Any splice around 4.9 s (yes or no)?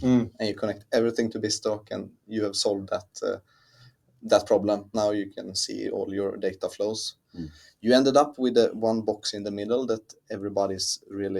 yes